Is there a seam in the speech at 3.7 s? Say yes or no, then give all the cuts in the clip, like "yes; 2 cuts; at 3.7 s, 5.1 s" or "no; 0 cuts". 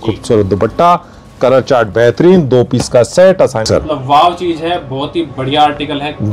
yes; 1 cut; at 3.7 s